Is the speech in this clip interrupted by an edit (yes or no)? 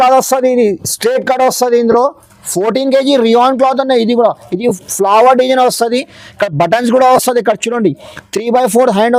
no